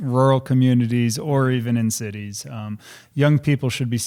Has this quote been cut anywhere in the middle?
no; 0 cuts

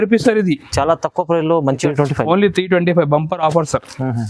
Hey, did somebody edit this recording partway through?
yes; 1 cut; at 1.8 s

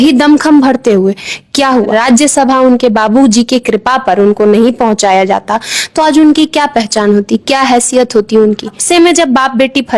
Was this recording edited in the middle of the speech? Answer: yes; 2 cuts; at 1.9 s, 8.8 s

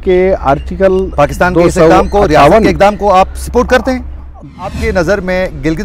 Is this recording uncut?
no; 1 cut; at 4.7 s

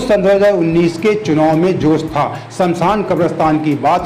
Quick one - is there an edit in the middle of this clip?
no; 0 cuts

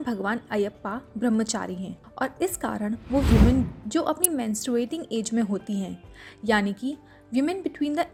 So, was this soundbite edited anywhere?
no; 0 cuts

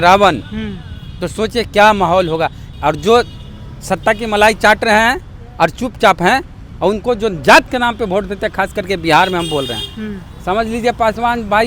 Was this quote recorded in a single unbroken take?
no; 1 cut; at 2.6 s

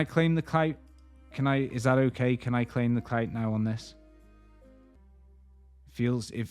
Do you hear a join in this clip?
no; 0 cuts

